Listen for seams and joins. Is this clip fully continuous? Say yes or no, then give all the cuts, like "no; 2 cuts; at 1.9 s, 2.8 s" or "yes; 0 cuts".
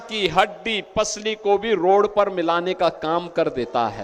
yes; 0 cuts